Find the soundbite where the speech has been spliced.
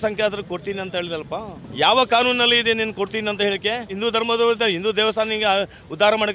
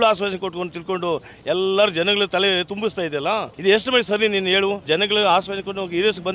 second; 2 cuts; at 3.5 s, 4.8 s

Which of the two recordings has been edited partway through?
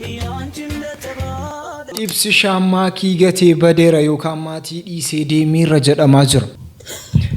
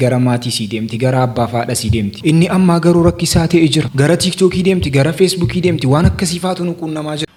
first; 1 cut; at 1.9 s

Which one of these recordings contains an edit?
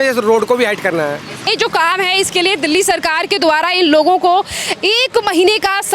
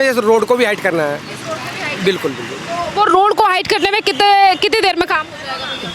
first; 1 cut; at 1.5 s

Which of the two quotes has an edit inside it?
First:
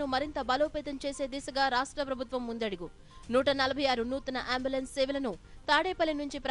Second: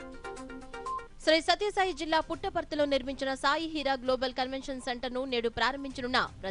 second; 1 cut; at 1.1 s

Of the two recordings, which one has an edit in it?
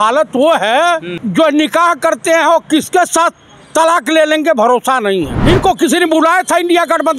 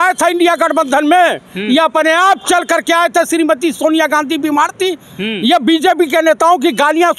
first; 2 cuts; at 1.2 s, 5.3 s

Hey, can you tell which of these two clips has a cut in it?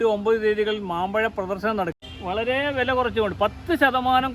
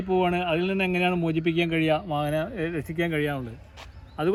first; 1 cut; at 2.1 s

